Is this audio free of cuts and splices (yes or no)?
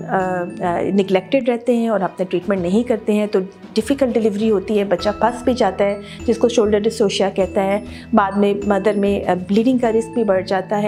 yes